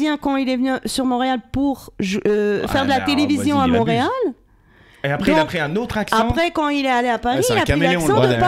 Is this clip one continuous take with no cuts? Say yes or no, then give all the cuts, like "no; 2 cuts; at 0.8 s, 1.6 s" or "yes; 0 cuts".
yes; 0 cuts